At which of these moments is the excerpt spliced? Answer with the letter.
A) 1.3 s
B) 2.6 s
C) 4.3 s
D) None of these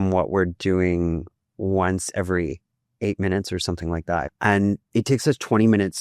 C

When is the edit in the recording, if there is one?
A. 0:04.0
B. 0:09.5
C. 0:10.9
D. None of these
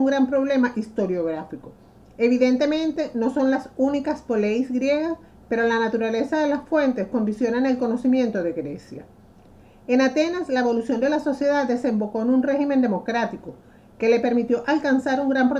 A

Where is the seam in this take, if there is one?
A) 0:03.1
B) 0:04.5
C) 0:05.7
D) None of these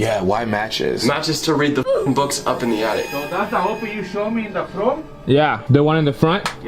A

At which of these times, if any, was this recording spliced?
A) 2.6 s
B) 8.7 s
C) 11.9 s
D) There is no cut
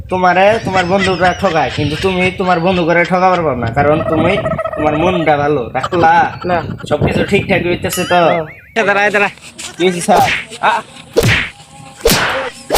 B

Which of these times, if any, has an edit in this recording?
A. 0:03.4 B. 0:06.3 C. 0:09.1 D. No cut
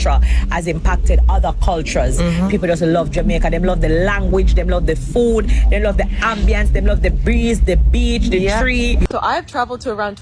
C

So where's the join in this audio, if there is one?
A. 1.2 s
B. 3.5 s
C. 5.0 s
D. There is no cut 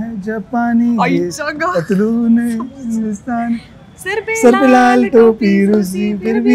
D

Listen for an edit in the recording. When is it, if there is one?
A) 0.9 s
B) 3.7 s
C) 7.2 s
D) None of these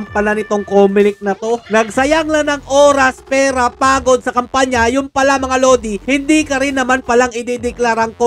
D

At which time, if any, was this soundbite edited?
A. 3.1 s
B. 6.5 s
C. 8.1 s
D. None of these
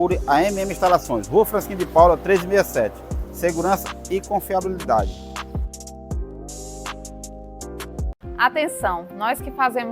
C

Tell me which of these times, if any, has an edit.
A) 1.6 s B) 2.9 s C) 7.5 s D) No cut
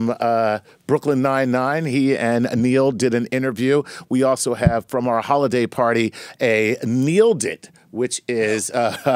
A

